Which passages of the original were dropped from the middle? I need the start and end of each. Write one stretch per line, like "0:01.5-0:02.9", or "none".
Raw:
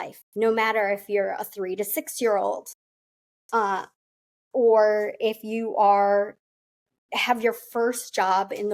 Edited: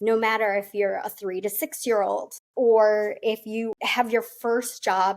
0:02.7-0:04.3
0:05.7-0:07.0